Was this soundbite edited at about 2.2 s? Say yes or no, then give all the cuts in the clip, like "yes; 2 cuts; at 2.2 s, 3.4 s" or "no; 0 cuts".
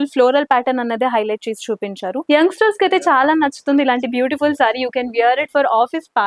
yes; 1 cut; at 2.2 s